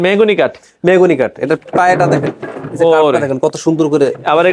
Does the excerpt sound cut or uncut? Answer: uncut